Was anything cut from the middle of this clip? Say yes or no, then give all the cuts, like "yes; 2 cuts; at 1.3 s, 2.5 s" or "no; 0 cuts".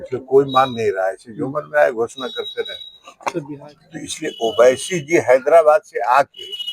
yes; 1 cut; at 3.5 s